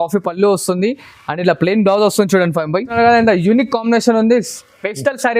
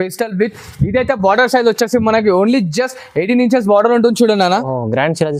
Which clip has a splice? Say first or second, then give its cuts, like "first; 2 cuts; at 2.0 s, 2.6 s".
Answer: first; 1 cut; at 3.0 s